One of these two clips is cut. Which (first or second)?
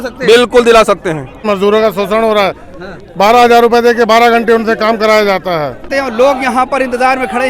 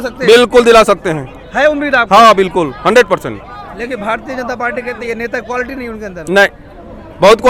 first